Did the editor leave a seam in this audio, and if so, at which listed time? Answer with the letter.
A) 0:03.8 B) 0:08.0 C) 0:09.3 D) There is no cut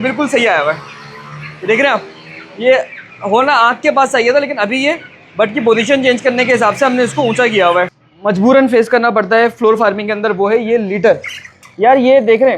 B